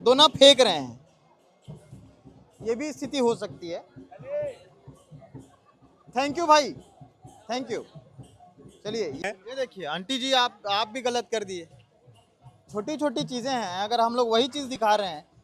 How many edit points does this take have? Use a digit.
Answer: 1